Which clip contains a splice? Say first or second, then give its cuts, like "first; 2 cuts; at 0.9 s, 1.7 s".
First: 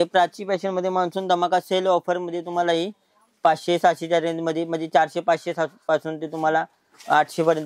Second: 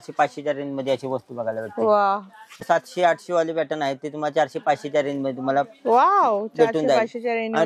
second; 1 cut; at 2.6 s